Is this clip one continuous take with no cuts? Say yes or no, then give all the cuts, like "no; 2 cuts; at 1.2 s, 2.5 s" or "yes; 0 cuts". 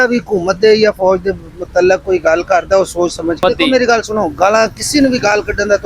no; 1 cut; at 3.4 s